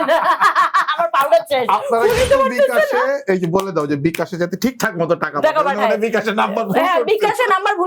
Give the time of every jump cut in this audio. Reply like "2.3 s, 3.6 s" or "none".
none

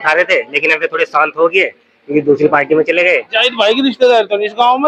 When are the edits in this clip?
none

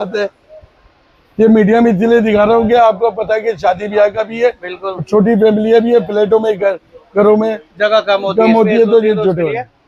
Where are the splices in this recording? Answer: none

